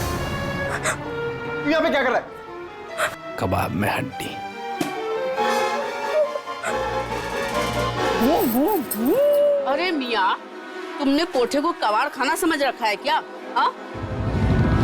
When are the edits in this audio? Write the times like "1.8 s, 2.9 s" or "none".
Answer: 8.2 s